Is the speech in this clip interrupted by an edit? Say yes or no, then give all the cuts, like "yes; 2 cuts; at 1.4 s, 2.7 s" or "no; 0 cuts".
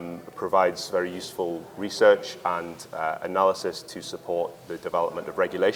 no; 0 cuts